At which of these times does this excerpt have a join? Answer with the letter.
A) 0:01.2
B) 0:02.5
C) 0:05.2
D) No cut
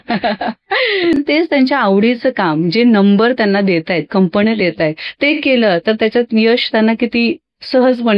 A